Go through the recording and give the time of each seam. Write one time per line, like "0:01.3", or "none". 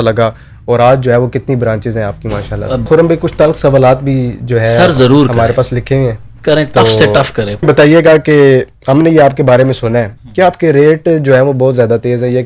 0:02.9
0:07.6